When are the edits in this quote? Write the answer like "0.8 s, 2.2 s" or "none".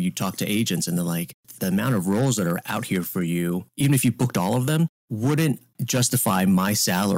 1.5 s, 2.6 s, 3.7 s, 5.0 s, 5.7 s